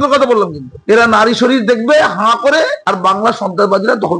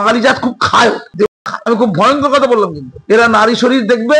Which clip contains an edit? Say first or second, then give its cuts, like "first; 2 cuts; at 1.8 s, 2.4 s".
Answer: second; 1 cut; at 1.3 s